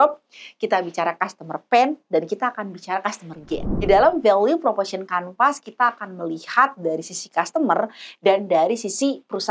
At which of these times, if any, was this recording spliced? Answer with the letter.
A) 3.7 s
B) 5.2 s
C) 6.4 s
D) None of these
A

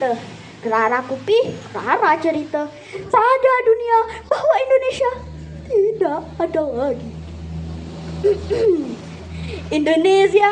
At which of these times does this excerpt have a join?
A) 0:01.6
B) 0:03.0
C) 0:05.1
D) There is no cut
B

